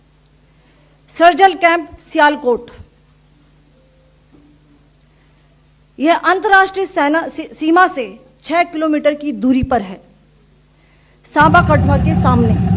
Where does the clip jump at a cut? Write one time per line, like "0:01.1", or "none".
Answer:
none